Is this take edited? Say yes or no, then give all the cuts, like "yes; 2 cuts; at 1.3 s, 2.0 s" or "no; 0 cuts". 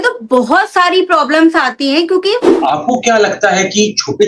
yes; 1 cut; at 2.5 s